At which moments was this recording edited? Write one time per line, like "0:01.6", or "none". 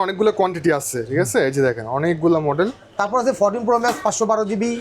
none

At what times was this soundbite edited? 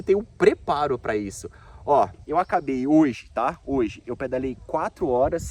none

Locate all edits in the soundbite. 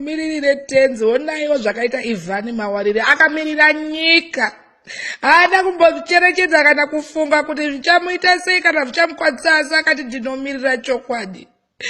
0:10.7

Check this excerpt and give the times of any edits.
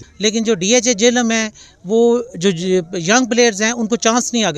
none

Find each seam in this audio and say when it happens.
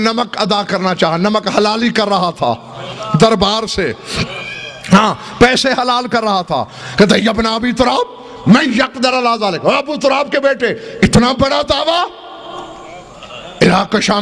none

